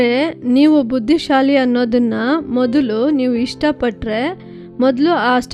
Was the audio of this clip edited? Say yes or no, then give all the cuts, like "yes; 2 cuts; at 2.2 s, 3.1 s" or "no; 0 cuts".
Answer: no; 0 cuts